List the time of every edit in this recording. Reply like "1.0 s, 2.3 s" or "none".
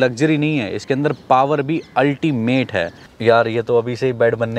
3.1 s